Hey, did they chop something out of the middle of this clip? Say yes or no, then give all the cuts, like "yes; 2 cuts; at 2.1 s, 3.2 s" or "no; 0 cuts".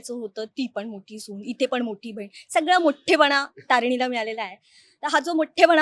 no; 0 cuts